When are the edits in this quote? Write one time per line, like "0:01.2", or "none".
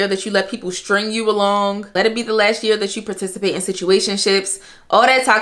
0:01.8